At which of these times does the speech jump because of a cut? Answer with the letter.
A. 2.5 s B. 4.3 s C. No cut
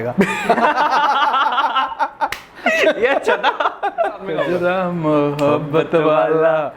B